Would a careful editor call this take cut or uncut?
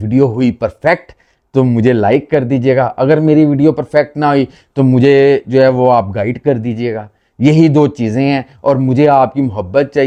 uncut